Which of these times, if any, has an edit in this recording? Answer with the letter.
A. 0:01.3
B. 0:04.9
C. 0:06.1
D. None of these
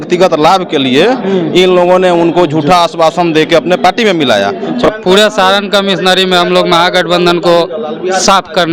B